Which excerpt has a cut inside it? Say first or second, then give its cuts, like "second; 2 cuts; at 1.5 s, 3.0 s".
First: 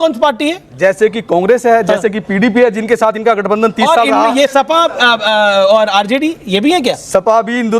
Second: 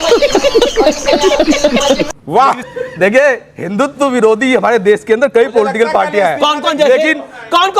second; 1 cut; at 2.6 s